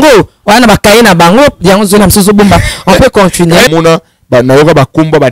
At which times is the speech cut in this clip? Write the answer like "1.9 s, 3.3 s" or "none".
3.7 s